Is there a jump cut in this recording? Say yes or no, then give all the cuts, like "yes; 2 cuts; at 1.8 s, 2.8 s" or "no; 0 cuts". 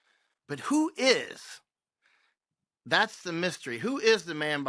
no; 0 cuts